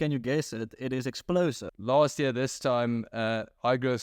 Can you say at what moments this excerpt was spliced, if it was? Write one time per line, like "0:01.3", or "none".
0:01.7

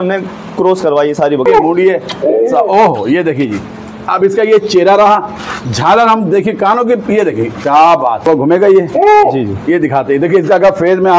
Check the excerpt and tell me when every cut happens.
0:01.4
0:08.3

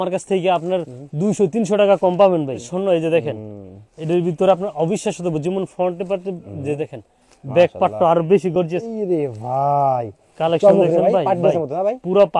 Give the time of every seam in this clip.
0:02.7
0:08.8

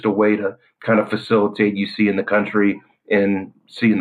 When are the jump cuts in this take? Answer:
none

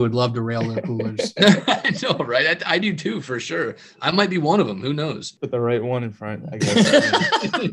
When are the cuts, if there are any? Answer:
0:05.3

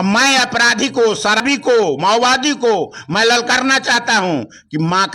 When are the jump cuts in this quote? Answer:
0:01.4

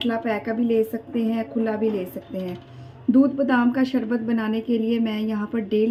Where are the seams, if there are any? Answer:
none

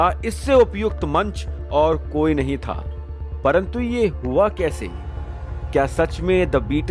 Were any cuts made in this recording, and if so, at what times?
none

